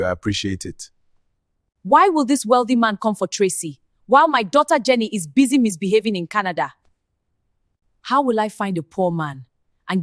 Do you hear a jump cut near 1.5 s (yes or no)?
yes